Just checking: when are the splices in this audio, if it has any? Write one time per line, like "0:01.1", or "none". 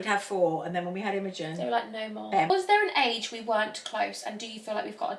0:02.5